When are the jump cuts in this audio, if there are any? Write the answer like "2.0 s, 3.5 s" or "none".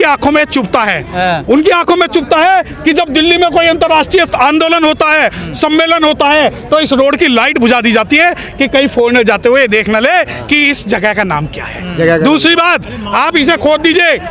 none